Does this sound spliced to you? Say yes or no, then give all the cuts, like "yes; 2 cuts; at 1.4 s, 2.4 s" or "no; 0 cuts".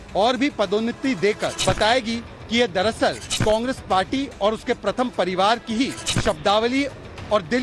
yes; 3 cuts; at 1.5 s, 3.3 s, 6.1 s